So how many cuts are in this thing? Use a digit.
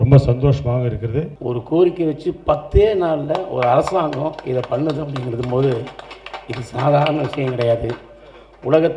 1